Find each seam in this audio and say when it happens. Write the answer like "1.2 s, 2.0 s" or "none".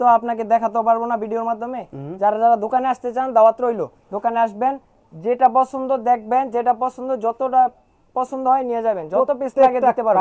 none